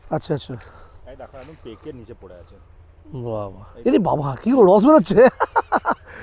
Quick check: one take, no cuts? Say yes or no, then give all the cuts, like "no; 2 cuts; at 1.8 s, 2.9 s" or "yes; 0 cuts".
yes; 0 cuts